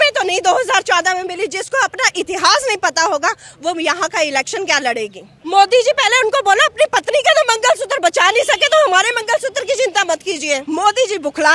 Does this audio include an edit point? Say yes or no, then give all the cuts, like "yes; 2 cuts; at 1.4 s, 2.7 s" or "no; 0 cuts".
yes; 2 cuts; at 5.3 s, 10.6 s